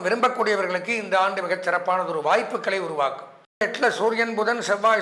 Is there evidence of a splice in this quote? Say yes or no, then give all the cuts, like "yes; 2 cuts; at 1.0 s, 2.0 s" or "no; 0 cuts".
yes; 1 cut; at 3.6 s